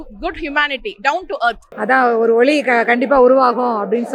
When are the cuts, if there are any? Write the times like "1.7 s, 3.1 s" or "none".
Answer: 1.7 s